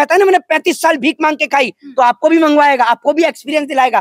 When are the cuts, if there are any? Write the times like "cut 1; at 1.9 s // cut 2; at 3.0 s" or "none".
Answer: none

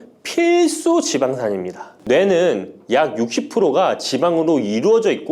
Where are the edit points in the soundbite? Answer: cut 1; at 1.9 s

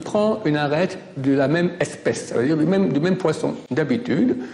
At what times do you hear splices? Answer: none

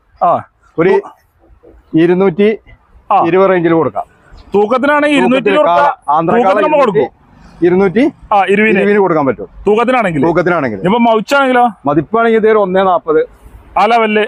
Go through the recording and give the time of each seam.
none

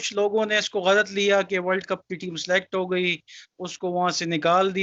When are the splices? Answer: none

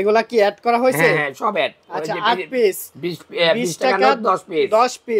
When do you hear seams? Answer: none

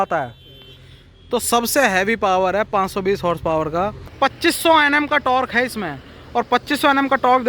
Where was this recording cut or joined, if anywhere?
cut 1; at 4.1 s

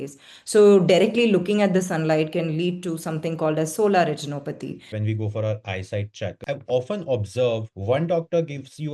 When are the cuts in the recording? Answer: cut 1; at 4.9 s // cut 2; at 6.4 s // cut 3; at 7.7 s

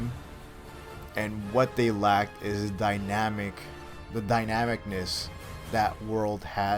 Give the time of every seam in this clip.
none

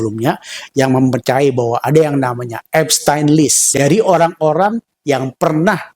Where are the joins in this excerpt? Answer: cut 1; at 3.6 s

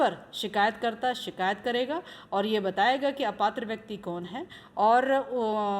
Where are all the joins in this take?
none

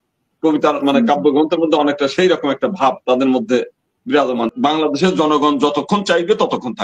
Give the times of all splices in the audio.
cut 1; at 4.5 s

